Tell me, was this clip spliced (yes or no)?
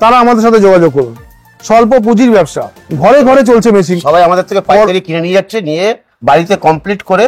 yes